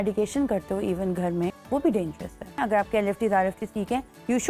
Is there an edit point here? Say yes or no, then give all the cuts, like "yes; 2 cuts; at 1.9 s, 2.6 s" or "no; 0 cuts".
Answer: yes; 2 cuts; at 1.6 s, 2.6 s